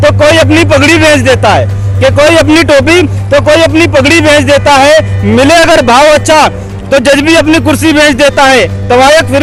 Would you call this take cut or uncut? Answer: uncut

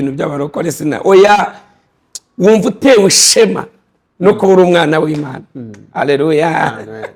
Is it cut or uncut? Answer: uncut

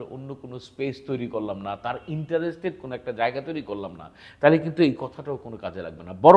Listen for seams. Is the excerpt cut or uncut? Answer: uncut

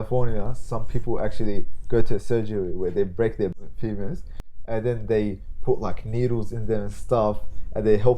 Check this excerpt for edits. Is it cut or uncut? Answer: cut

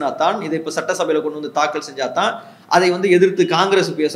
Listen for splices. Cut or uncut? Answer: uncut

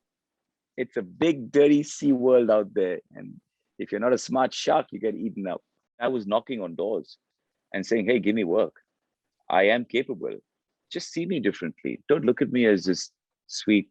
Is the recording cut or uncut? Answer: cut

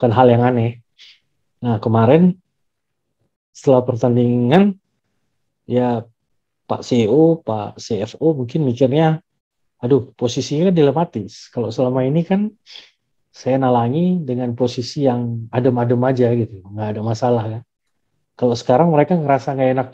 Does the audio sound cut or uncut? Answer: uncut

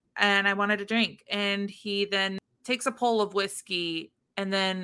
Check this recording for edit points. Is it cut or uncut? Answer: cut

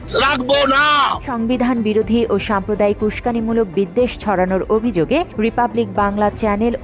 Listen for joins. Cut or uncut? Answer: cut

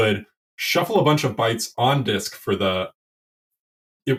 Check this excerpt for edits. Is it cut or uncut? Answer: uncut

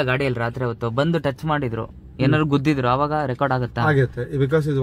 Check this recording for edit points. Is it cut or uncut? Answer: uncut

